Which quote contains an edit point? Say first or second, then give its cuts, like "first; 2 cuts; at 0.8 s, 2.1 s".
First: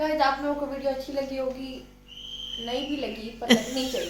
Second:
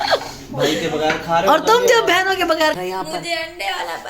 second; 1 cut; at 2.8 s